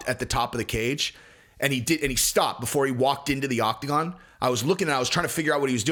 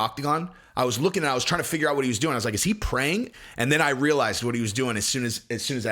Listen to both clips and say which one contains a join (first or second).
second